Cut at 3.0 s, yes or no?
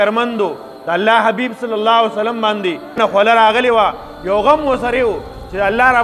yes